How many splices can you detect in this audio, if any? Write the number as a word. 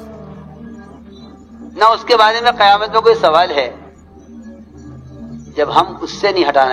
one